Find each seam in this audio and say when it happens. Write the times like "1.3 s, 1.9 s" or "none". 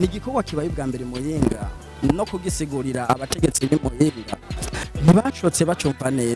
none